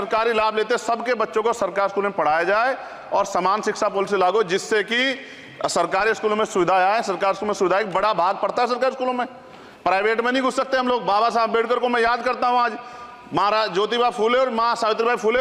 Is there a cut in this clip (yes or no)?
no